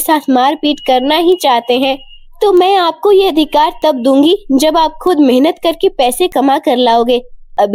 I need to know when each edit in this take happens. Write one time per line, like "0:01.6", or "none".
none